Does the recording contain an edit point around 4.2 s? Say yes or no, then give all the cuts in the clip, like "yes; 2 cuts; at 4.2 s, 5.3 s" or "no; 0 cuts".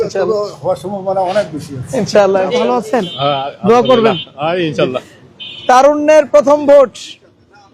no; 1 cut; at 2.9 s